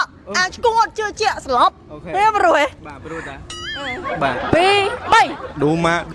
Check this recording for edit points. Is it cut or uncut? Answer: cut